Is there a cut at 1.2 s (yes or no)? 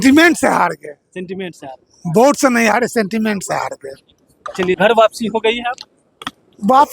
no